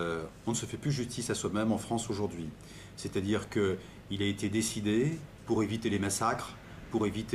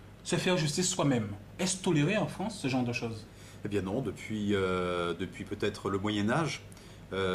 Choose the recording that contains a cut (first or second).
first